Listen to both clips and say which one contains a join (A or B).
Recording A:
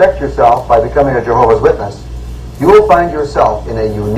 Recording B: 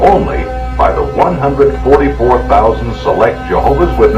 A